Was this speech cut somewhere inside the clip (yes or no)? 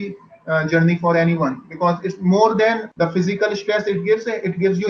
yes